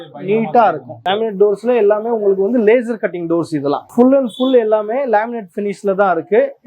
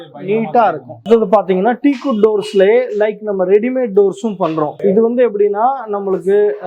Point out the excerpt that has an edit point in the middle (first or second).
first